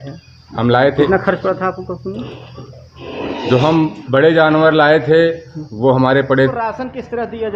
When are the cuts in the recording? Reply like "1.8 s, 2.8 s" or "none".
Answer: 1.1 s, 6.5 s